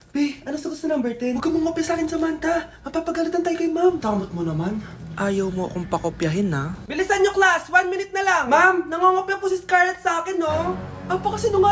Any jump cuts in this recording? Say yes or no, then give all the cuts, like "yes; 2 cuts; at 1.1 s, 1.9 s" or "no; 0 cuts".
no; 0 cuts